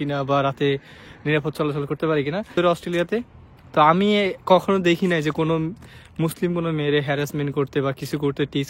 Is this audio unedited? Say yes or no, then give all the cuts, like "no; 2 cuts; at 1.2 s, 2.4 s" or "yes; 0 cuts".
yes; 0 cuts